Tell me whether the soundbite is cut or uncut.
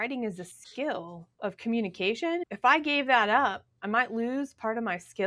cut